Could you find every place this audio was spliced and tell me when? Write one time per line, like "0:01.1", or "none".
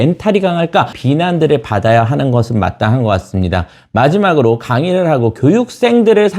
0:01.0